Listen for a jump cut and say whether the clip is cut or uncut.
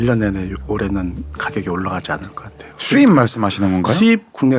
uncut